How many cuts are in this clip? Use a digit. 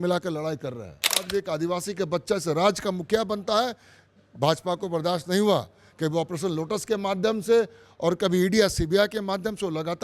1